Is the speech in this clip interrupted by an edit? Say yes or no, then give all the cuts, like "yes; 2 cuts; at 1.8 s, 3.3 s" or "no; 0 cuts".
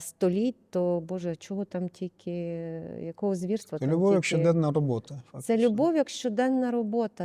no; 0 cuts